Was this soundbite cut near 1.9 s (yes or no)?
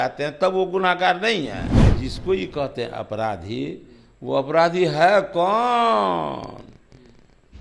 yes